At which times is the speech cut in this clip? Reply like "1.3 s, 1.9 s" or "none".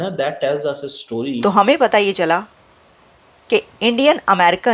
1.4 s